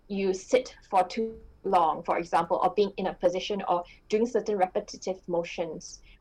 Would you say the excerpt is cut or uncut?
uncut